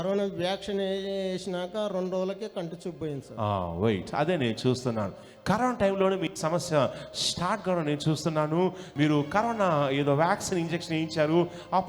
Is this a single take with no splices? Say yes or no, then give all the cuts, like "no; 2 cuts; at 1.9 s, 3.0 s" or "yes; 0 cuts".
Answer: no; 1 cut; at 8.8 s